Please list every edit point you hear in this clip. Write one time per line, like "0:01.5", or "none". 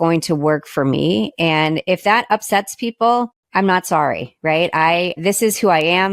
0:03.4
0:05.2